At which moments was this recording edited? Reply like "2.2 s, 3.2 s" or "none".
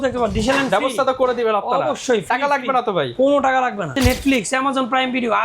3.9 s

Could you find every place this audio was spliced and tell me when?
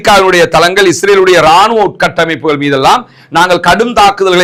none

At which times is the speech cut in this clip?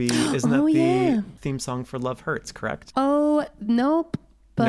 1.3 s, 2.8 s

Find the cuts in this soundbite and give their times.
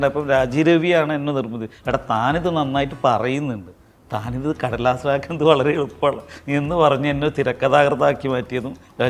none

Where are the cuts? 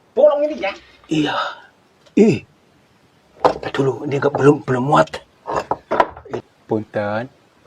6.4 s

